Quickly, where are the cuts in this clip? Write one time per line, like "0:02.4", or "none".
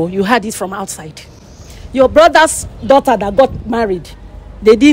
none